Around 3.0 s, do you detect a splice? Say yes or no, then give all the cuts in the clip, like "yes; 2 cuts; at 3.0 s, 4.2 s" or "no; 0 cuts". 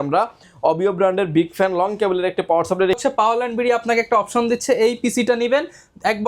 yes; 1 cut; at 3.0 s